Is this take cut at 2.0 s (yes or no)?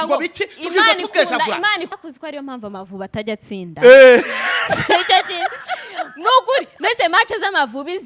yes